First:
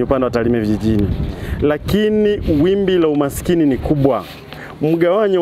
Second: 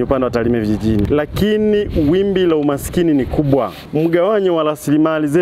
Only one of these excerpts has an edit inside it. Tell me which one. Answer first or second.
second